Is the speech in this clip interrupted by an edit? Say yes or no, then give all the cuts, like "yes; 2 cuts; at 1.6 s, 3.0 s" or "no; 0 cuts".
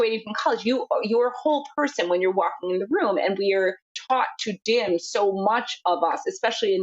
yes; 1 cut; at 3.9 s